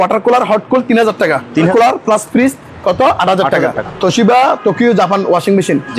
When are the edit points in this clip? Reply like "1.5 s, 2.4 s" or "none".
1.7 s, 3.8 s